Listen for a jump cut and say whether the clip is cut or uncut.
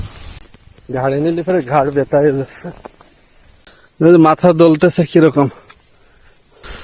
uncut